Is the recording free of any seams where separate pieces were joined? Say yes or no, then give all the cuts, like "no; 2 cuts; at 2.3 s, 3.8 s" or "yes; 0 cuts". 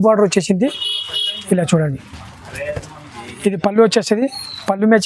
yes; 0 cuts